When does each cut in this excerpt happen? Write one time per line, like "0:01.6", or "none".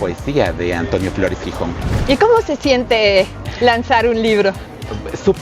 0:01.9